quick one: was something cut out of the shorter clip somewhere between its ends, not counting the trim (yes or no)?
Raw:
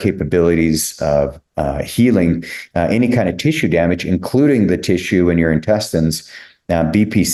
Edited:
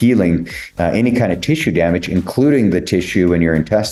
no